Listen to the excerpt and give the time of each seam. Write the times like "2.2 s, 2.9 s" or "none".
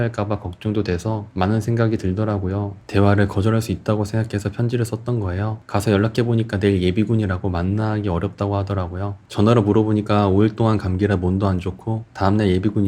2.8 s, 9.2 s